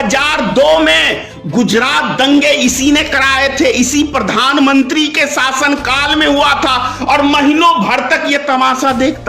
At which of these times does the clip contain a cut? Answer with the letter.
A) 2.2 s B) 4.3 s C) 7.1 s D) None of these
D